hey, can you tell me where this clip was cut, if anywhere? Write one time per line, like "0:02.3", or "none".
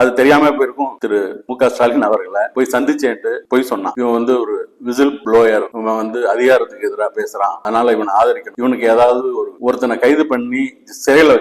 0:00.9
0:03.9
0:09.6